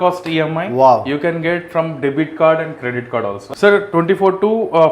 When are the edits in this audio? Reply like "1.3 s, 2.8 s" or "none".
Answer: 3.4 s

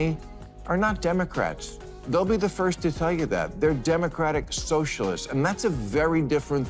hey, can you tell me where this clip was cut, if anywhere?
none

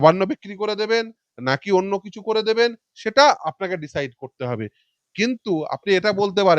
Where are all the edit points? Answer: none

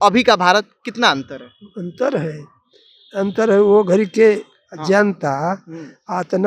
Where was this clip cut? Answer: none

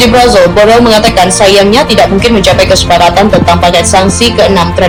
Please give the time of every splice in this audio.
none

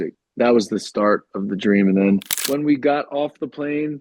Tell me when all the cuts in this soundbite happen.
2.3 s

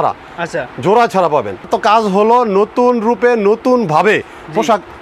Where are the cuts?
1.7 s

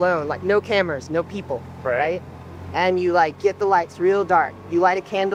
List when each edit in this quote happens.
none

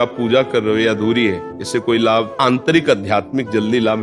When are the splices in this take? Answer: 1.5 s, 2.3 s

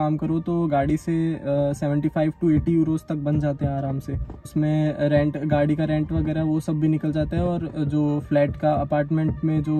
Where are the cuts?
none

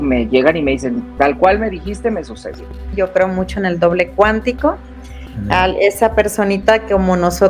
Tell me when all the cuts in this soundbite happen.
2.9 s

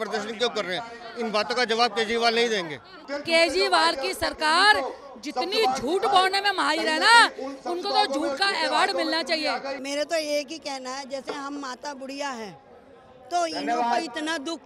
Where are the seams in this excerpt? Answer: 3.0 s, 9.8 s

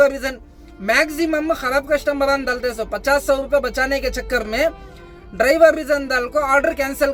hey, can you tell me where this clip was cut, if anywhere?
none

